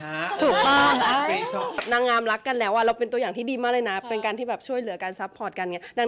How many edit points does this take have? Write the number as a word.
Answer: one